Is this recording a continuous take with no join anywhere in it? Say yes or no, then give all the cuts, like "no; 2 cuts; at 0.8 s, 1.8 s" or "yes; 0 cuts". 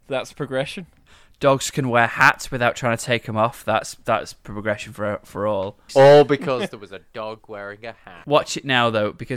no; 2 cuts; at 5.9 s, 8.1 s